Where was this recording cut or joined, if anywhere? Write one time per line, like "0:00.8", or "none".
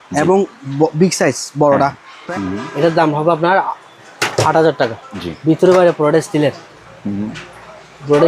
0:02.1
0:05.1